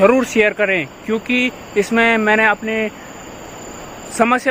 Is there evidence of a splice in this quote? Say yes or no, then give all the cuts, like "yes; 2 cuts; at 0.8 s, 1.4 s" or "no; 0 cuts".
no; 0 cuts